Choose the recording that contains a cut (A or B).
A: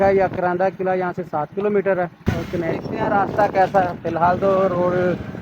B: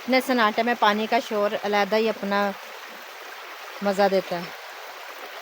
A